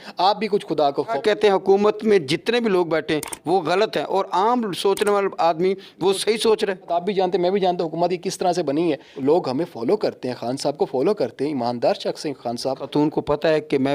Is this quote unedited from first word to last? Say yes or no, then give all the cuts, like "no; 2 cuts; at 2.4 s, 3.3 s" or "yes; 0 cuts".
no; 4 cuts; at 1.2 s, 6.9 s, 9.1 s, 12.8 s